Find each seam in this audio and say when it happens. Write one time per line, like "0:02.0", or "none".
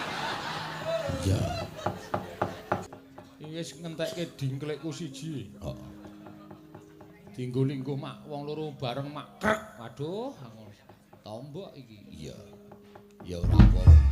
0:02.9